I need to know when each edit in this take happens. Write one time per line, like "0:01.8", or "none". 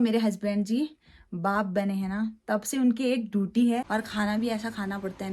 0:03.9